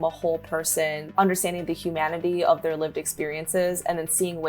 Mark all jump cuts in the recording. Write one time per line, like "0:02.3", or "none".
0:01.0